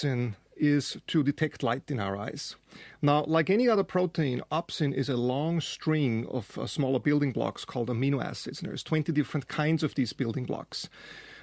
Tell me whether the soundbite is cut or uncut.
uncut